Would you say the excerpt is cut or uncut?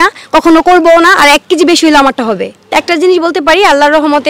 cut